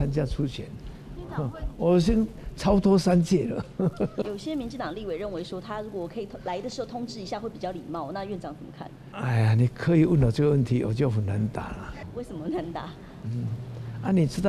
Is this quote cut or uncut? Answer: cut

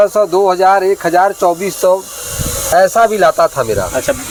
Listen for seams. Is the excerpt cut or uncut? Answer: uncut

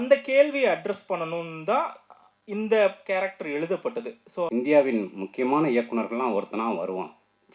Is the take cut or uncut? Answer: cut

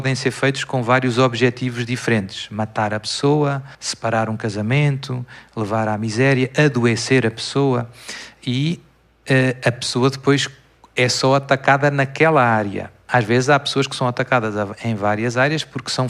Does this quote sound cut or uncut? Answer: uncut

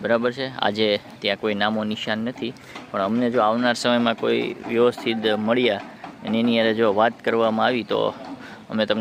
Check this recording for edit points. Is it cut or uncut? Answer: uncut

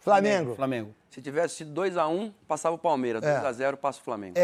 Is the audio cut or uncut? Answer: uncut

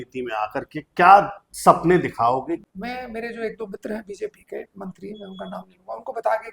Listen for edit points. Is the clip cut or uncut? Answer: cut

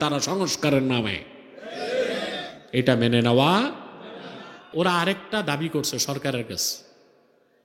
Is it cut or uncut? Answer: uncut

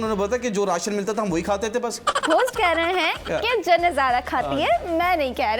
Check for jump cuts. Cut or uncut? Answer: cut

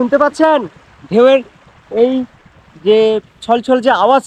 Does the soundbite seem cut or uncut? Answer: uncut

